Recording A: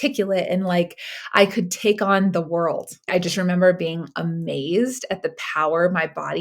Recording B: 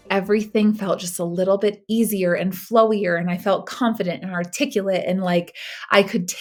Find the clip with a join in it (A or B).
A